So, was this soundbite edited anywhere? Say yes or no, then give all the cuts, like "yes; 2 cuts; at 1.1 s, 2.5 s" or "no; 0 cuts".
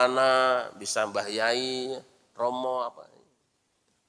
yes; 1 cut; at 3.1 s